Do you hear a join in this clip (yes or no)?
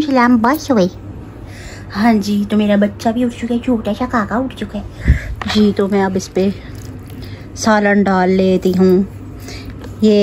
no